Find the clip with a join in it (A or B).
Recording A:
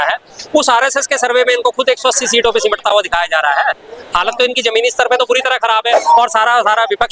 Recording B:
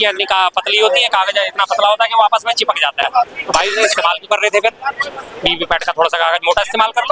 A